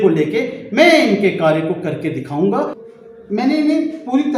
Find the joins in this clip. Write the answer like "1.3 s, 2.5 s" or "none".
2.8 s